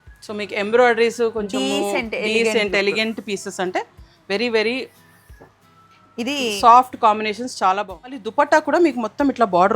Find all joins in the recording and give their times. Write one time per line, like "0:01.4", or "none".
0:08.3